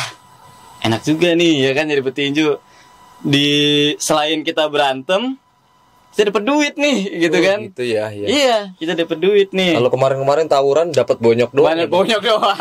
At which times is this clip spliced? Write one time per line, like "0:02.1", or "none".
none